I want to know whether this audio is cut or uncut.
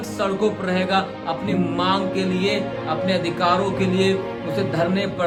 uncut